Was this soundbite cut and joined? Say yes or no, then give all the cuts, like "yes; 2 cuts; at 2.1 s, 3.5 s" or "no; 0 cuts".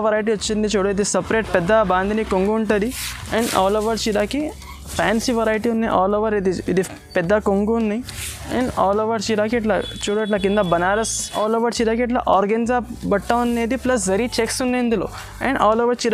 yes; 2 cuts; at 4.9 s, 11.3 s